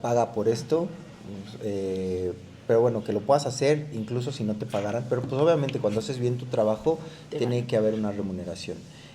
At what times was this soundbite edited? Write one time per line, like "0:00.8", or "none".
none